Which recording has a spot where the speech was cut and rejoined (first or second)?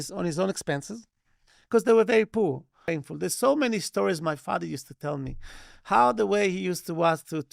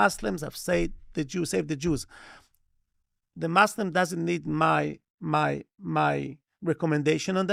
first